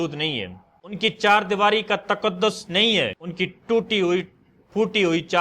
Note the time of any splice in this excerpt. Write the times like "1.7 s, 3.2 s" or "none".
1.0 s, 3.2 s